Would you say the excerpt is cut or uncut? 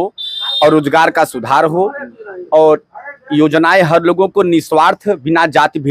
uncut